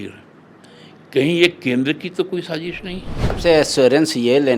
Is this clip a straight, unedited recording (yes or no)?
no